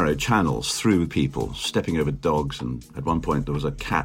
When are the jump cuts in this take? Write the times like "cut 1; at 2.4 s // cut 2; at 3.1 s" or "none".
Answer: cut 1; at 2.9 s